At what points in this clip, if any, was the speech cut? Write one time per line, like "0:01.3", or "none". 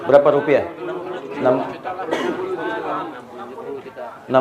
0:01.2